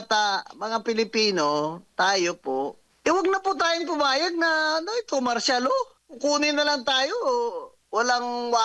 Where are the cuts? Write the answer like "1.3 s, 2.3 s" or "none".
2.9 s, 6.0 s, 7.7 s

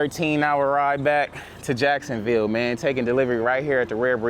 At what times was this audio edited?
none

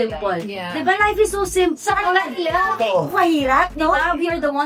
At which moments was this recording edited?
none

